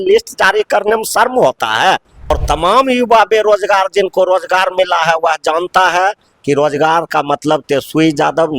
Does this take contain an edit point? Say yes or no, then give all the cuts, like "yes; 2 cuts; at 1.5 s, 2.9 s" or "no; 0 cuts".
yes; 1 cut; at 2.3 s